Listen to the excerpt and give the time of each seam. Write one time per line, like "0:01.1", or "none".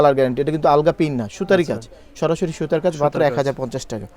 none